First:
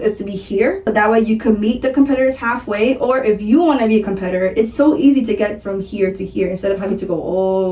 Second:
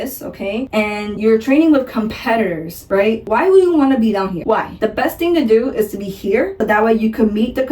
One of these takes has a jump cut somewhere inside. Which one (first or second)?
second